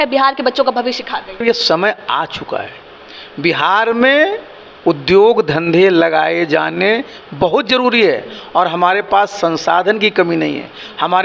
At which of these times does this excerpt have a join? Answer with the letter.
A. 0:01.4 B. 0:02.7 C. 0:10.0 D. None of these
A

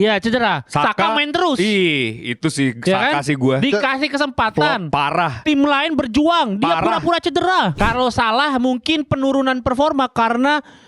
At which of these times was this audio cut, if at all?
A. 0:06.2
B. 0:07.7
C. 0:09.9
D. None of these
B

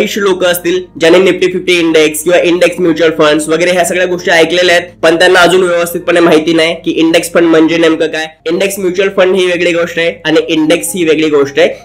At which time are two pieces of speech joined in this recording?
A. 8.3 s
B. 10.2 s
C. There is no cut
A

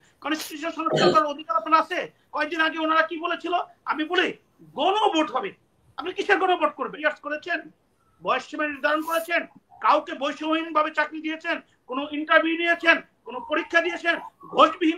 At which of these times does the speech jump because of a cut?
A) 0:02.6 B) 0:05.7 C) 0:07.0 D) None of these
C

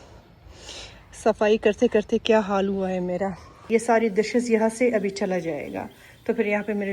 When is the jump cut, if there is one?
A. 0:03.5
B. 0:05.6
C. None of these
A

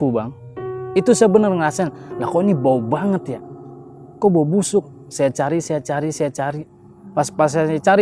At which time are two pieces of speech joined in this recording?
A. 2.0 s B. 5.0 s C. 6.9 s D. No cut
C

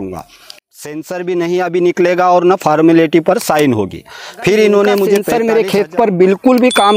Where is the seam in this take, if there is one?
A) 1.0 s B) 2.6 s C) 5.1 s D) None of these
C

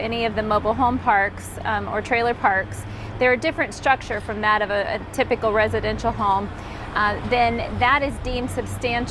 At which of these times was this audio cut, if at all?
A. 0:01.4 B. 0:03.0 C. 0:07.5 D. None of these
D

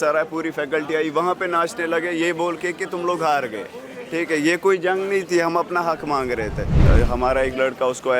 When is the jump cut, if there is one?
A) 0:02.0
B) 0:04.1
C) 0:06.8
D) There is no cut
C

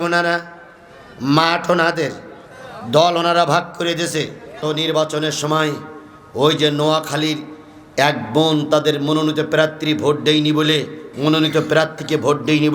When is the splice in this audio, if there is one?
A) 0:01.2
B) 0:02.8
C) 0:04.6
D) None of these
C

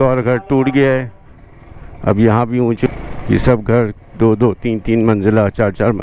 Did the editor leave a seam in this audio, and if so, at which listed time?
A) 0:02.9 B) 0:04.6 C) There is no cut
A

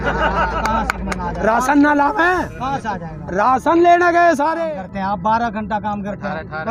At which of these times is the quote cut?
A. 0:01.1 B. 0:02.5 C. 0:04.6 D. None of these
C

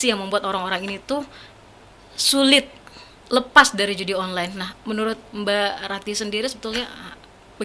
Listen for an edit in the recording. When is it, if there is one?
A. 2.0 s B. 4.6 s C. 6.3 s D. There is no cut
D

